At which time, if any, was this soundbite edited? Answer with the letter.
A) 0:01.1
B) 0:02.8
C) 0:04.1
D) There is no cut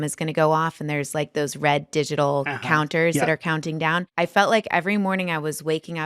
C